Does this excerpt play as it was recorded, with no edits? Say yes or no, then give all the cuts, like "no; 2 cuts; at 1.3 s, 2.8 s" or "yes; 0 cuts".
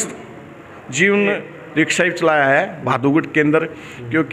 no; 1 cut; at 1.5 s